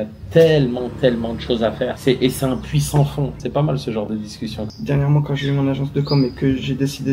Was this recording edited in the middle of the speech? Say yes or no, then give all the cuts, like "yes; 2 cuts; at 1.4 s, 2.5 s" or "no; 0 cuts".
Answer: yes; 1 cut; at 4.7 s